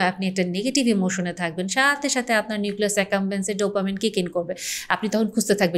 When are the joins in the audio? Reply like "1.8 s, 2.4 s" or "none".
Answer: none